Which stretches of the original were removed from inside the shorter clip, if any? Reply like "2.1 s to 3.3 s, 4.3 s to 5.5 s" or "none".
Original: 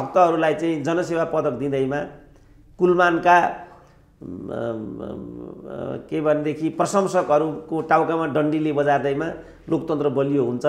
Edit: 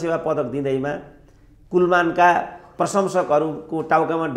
3.8 s to 6.7 s